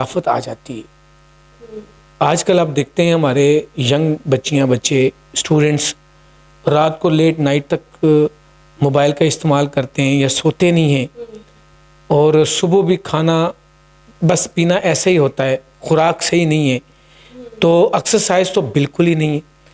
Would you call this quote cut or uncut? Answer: uncut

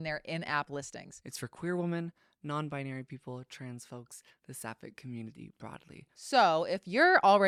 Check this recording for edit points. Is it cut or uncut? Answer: uncut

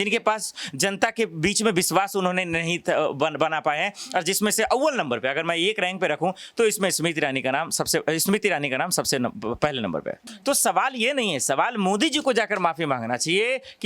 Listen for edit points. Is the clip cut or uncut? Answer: cut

